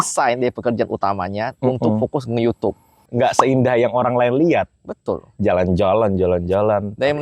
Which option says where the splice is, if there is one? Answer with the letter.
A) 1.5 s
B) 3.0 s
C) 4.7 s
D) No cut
B